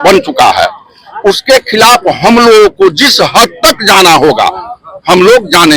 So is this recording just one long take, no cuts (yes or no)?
yes